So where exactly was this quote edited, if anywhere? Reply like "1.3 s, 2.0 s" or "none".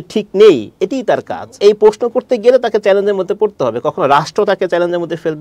1.5 s